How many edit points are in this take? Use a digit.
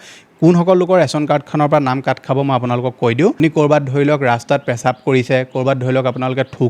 1